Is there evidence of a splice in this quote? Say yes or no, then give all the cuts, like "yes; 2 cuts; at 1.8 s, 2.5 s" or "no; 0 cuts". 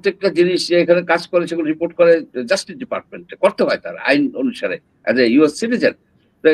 no; 0 cuts